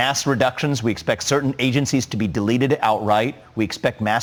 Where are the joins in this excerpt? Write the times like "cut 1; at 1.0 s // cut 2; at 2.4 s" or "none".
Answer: none

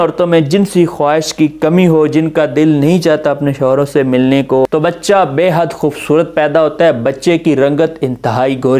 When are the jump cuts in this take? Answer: cut 1; at 4.7 s

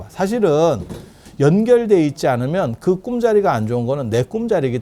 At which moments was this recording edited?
none

